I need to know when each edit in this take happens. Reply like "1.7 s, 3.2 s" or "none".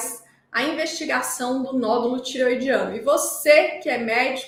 none